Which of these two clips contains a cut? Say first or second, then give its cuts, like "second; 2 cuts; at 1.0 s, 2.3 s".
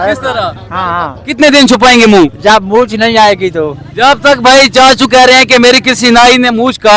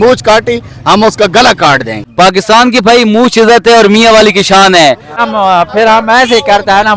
second; 2 cuts; at 2.0 s, 5.1 s